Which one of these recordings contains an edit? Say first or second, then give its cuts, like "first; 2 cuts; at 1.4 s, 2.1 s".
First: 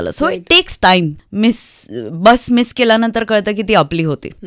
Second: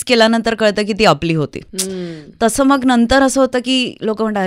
first; 1 cut; at 1.2 s